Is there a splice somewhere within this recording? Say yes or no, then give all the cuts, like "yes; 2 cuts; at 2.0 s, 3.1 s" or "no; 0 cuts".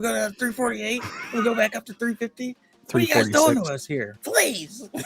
yes; 1 cut; at 4.2 s